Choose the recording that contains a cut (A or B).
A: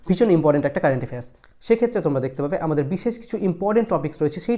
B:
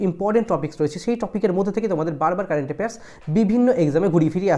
A